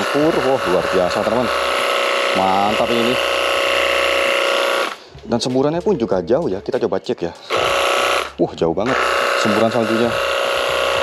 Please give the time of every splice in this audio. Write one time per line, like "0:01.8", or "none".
none